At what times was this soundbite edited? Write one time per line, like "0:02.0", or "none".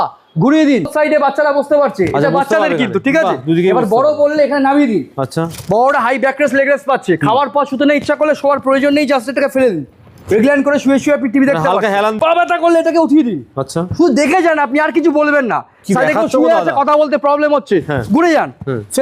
0:00.9
0:12.2